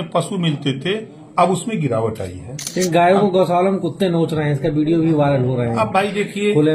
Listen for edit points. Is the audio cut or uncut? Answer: cut